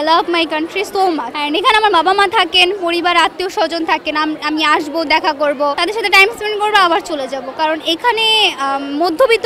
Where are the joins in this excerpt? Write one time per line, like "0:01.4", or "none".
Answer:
0:01.3
0:05.8